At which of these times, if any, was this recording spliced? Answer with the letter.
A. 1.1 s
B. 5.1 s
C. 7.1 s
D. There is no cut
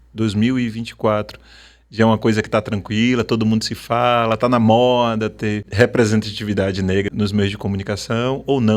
C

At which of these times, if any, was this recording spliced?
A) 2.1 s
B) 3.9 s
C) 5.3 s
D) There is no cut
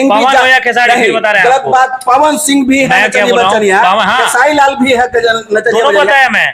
D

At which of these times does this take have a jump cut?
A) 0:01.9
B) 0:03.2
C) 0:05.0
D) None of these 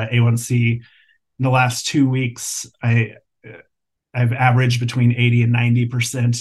D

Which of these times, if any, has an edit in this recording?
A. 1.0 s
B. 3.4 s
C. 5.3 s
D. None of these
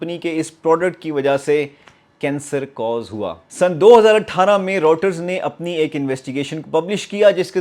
B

